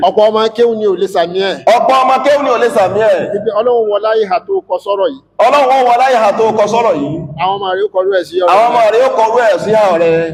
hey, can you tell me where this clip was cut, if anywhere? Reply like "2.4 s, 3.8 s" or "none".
none